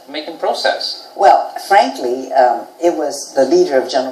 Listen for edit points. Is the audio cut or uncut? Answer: cut